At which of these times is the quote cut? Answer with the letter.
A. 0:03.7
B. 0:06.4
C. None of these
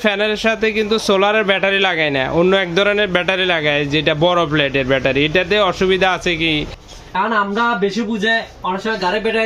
B